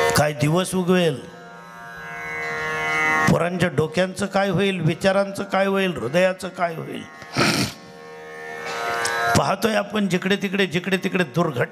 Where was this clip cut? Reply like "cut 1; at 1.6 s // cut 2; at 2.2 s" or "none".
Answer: none